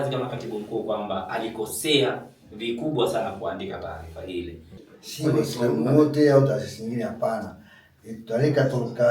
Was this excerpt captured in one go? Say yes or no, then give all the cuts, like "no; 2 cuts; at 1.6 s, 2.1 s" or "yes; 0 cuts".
no; 1 cut; at 4.7 s